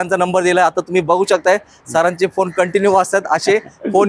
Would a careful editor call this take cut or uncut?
uncut